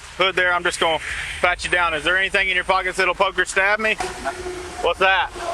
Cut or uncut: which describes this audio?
cut